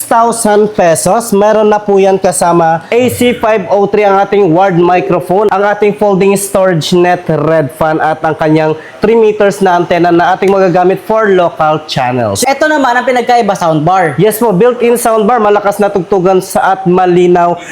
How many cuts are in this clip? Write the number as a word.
three